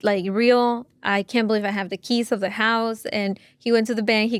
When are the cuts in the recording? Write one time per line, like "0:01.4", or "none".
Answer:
none